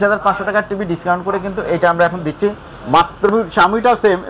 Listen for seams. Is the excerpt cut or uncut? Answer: cut